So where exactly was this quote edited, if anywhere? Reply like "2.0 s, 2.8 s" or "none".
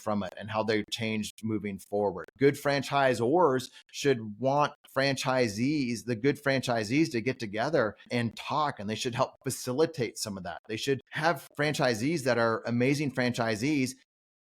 2.3 s, 8.0 s, 11.5 s